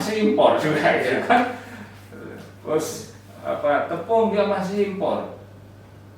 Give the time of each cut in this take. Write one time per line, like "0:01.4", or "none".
none